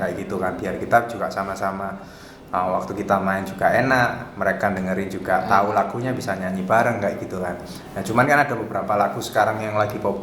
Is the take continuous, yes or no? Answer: yes